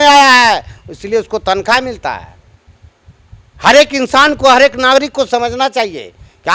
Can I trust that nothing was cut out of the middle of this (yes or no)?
yes